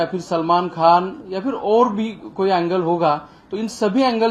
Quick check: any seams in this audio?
no; 0 cuts

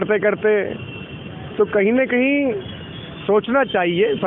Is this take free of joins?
yes; 0 cuts

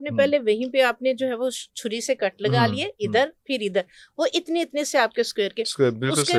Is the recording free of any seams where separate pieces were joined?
yes; 0 cuts

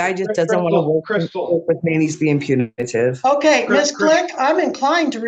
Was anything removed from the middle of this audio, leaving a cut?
no; 0 cuts

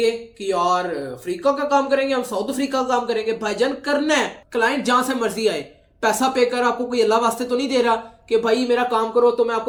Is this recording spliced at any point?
no; 0 cuts

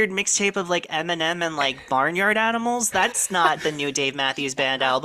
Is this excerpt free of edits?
yes; 0 cuts

